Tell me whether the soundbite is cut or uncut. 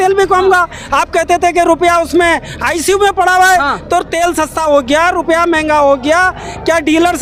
uncut